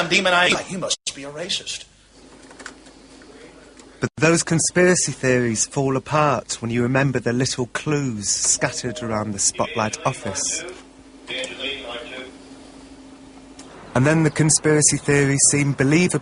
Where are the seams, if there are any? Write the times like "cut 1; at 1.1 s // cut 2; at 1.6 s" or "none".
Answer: none